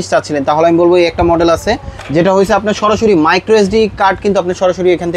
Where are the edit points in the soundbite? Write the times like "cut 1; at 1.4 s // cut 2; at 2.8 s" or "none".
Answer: none